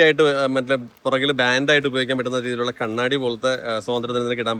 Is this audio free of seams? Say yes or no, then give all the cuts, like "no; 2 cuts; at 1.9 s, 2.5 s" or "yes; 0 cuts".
yes; 0 cuts